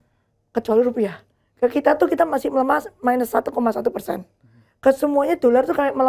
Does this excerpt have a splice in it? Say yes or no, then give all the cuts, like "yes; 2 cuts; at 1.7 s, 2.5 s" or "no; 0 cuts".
no; 0 cuts